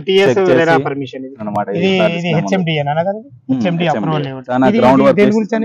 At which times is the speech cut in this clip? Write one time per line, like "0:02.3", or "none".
0:01.4
0:04.4